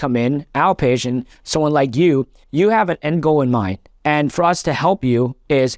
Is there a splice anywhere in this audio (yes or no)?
yes